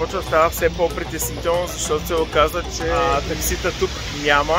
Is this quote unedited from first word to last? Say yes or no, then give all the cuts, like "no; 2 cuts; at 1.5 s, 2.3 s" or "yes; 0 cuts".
no; 1 cut; at 3.1 s